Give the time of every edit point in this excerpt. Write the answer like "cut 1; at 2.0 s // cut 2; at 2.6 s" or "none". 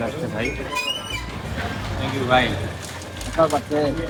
none